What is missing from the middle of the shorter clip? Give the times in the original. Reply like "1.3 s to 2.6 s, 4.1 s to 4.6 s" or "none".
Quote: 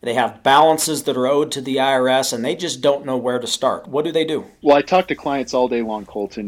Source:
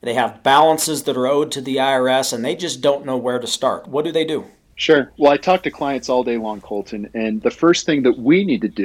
4.6 s to 5.1 s